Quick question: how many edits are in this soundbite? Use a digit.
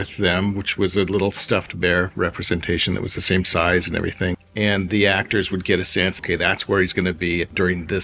2